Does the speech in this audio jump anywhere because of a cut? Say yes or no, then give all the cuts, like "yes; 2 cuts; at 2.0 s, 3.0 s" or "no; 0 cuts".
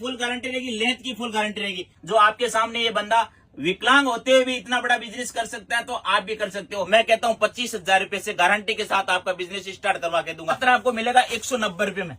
yes; 3 cuts; at 1.9 s, 6.9 s, 10.6 s